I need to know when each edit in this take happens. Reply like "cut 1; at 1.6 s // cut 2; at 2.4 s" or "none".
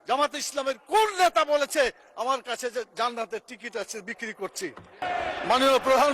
cut 1; at 5.0 s